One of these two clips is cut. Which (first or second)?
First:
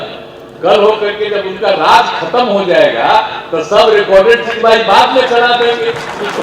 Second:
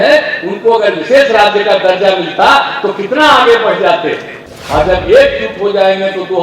second